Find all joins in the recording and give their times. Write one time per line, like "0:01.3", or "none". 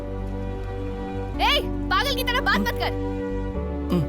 0:01.3